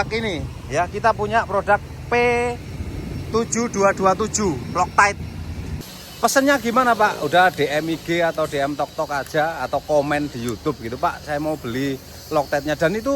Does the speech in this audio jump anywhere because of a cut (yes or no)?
yes